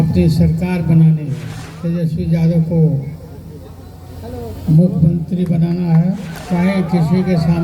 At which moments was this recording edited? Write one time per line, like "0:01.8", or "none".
0:06.3

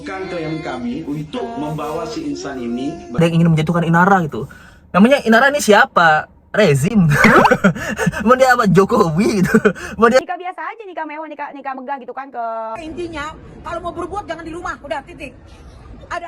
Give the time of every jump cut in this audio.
0:03.2
0:10.2
0:12.8

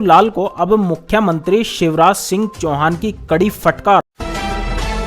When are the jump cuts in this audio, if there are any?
0:04.1

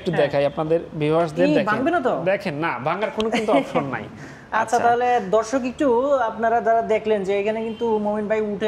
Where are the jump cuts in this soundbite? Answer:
none

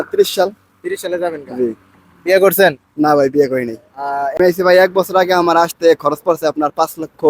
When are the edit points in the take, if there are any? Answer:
0:04.3

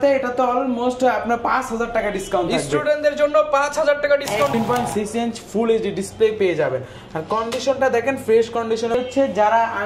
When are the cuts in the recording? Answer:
0:04.5
0:09.0

